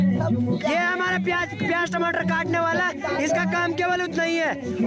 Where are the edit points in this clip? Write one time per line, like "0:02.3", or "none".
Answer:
none